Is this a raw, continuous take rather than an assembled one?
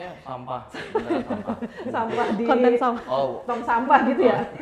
yes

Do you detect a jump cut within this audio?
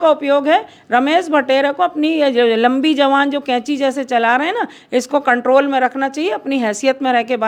no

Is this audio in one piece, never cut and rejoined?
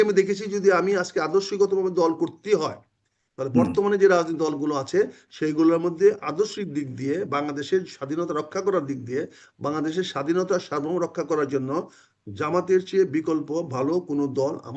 yes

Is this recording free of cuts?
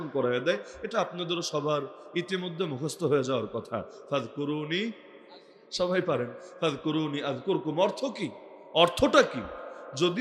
yes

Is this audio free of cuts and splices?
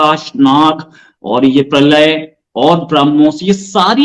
yes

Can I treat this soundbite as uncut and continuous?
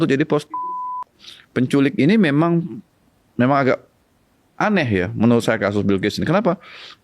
no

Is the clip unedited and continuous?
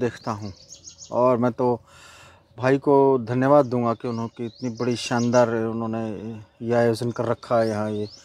yes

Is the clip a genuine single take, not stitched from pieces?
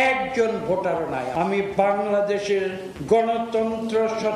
no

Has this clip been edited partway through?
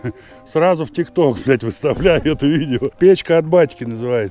yes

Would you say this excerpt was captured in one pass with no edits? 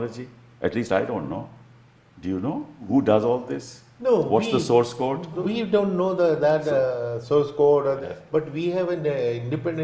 no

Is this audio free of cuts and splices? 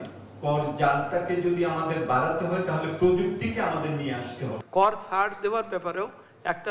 no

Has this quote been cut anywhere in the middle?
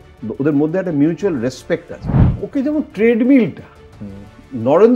yes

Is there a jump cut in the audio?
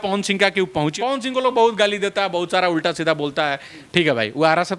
yes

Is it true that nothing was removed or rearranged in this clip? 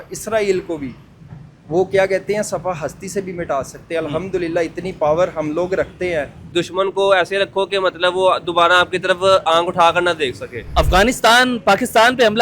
no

